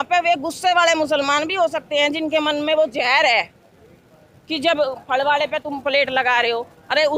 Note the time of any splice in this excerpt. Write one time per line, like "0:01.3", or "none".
none